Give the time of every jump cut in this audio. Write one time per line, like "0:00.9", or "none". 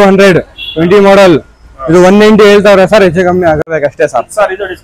0:03.7